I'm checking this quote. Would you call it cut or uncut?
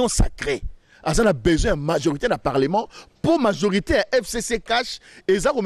uncut